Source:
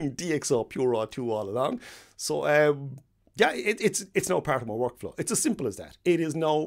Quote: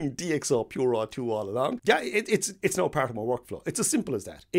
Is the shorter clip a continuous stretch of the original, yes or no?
no